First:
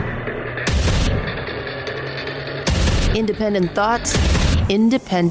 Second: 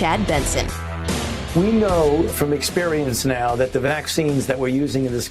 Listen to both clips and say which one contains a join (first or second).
second